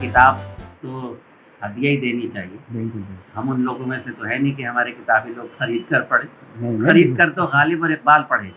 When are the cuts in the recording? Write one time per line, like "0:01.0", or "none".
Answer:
none